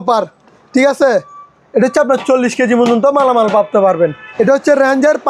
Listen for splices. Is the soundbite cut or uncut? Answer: cut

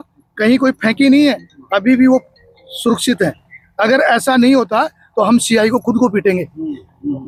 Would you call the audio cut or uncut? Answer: uncut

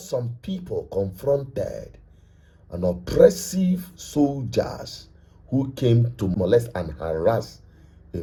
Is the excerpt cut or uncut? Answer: uncut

